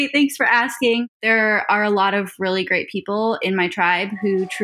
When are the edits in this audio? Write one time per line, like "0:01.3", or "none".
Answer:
0:01.1